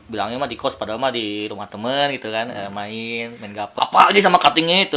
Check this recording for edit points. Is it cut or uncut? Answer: cut